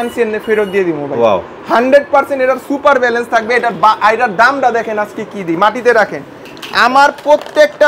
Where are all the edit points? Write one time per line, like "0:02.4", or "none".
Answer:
none